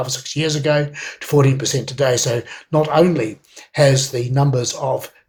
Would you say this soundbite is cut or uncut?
uncut